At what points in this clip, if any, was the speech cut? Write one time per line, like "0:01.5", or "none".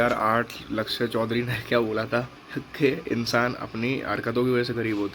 none